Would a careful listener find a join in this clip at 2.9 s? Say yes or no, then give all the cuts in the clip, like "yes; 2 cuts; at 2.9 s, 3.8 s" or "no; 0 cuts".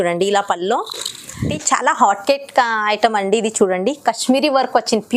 no; 1 cut; at 1.6 s